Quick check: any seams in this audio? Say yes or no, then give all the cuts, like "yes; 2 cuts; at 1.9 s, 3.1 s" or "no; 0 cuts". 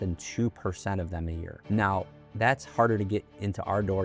yes; 1 cut; at 1.5 s